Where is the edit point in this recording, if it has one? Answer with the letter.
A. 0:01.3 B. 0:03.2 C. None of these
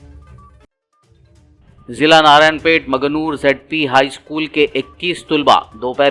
A